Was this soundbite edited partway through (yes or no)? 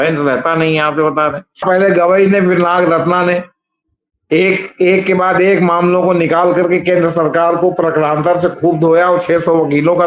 yes